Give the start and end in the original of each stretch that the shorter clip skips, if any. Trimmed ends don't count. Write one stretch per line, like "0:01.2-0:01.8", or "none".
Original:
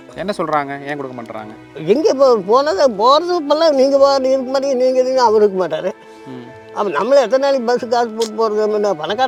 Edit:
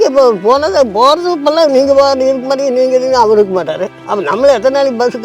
0:06.0-0:06.6

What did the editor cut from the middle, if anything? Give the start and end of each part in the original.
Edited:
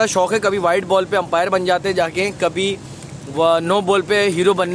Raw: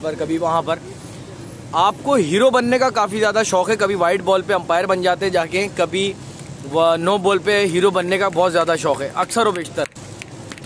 none

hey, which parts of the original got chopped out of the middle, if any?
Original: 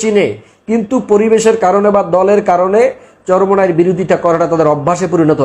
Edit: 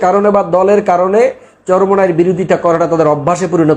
none

